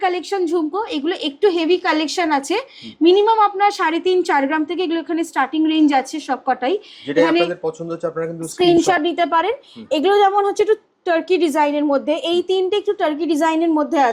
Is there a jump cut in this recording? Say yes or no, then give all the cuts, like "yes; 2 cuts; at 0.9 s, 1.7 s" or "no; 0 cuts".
no; 0 cuts